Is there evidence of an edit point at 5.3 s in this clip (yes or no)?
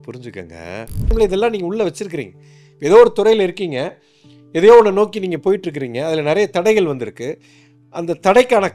no